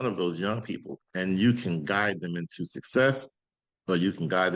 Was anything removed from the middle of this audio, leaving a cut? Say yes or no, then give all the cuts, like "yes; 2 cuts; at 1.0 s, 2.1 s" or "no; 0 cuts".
yes; 1 cut; at 1.0 s